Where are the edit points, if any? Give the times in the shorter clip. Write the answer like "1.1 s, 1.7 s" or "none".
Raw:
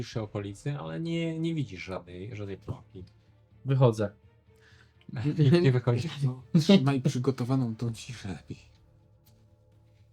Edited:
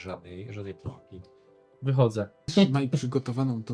2.5 s

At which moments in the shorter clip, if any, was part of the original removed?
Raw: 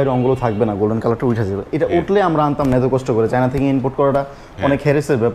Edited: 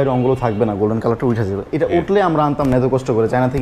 none

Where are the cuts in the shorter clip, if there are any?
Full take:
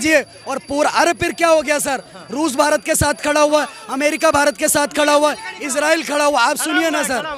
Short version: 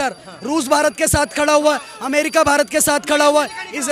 none

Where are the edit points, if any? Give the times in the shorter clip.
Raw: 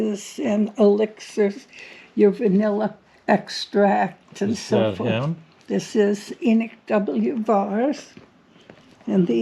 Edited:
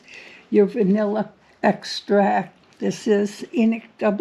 2.6 s

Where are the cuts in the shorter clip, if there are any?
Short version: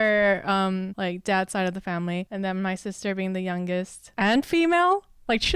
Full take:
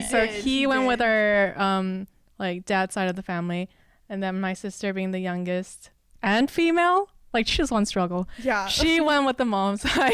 0.9 s, 2.3 s, 4.0 s

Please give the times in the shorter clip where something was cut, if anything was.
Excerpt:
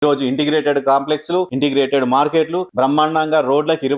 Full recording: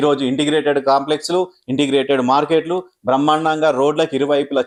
1.5 s, 2.7 s

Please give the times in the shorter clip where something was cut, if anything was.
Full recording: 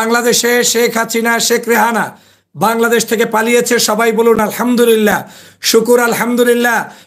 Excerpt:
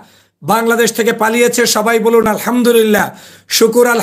none

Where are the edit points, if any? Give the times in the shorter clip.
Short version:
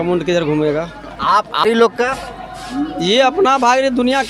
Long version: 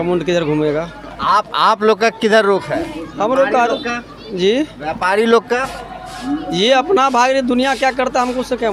1.6 s

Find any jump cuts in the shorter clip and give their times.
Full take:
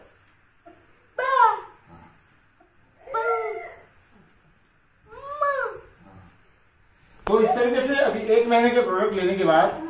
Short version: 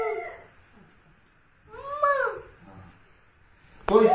none

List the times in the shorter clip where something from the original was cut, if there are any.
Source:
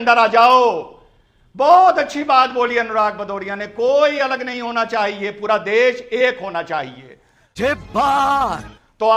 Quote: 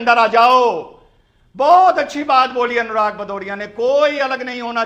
none

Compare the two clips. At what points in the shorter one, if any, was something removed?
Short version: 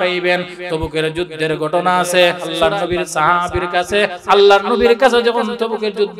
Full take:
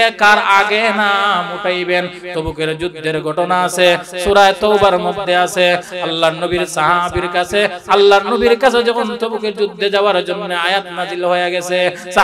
2.4 s

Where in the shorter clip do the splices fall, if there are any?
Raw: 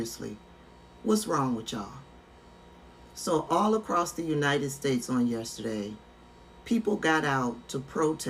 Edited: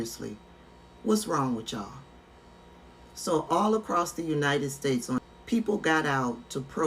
5.2 s

